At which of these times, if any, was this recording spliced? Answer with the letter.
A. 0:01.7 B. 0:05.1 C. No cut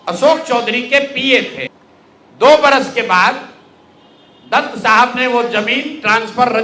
A